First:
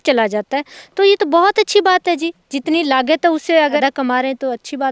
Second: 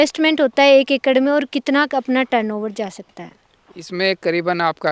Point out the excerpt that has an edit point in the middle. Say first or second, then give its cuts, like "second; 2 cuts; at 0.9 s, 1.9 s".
first; 1 cut; at 3.8 s